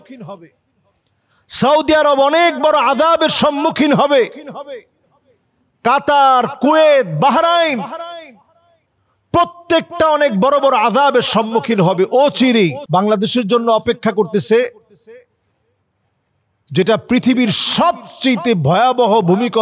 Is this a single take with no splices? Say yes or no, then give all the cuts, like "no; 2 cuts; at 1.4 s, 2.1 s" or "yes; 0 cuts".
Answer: no; 1 cut; at 12.8 s